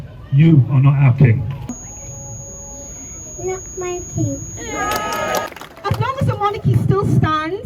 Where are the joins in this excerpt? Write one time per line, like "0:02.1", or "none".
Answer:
0:01.6
0:05.5